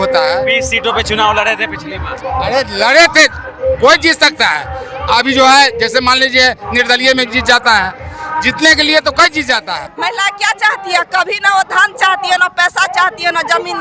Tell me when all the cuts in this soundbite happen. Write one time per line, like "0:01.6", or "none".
0:09.9